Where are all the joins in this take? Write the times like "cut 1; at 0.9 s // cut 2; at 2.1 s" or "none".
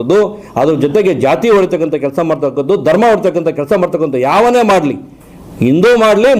none

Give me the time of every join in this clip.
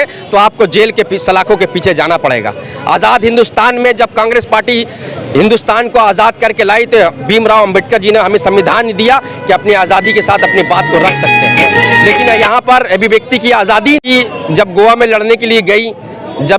cut 1; at 14.1 s

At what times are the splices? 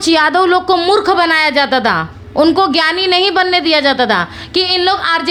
none

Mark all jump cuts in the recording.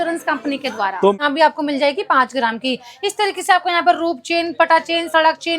cut 1; at 1.2 s

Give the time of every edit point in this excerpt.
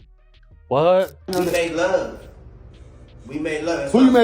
cut 1; at 1.2 s

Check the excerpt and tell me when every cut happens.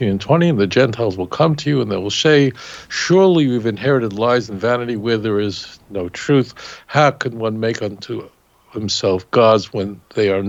none

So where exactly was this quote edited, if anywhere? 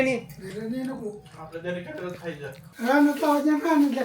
cut 1; at 2.7 s

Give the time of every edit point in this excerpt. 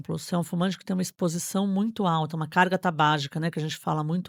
none

